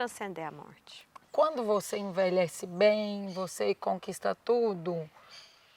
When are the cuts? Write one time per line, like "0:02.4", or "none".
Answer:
0:01.1